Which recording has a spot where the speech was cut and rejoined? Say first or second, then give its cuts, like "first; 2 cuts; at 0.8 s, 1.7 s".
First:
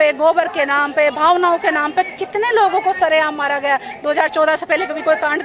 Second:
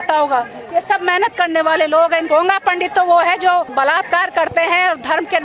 second; 2 cuts; at 2.2 s, 3.7 s